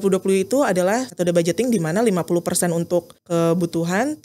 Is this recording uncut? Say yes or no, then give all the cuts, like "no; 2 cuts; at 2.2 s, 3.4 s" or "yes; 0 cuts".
no; 2 cuts; at 1.1 s, 3.2 s